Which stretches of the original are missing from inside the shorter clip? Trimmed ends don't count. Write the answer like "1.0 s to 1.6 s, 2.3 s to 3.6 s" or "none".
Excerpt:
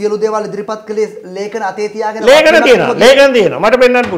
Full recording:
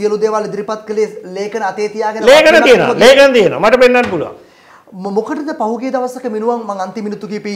none